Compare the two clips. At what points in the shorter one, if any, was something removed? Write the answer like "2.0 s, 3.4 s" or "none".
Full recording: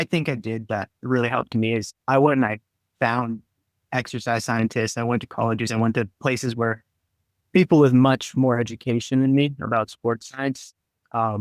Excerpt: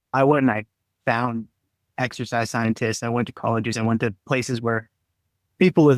none